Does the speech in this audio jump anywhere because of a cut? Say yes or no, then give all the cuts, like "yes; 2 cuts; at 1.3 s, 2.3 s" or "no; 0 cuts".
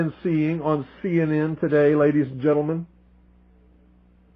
no; 0 cuts